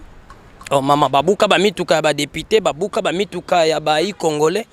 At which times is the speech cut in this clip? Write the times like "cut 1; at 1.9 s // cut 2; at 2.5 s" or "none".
none